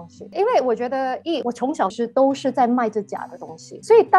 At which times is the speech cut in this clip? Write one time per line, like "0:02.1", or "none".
0:01.9